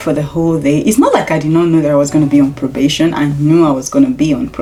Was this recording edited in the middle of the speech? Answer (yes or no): no